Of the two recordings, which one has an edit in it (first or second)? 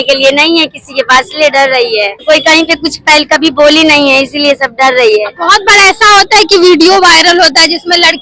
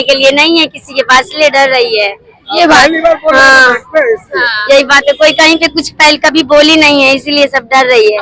first